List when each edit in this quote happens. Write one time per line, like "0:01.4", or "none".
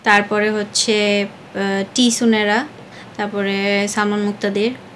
none